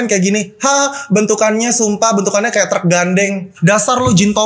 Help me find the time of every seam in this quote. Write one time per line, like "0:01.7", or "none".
0:03.5